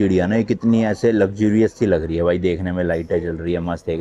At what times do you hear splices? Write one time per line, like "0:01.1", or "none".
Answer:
none